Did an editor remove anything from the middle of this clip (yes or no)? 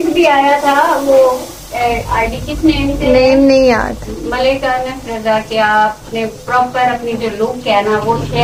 no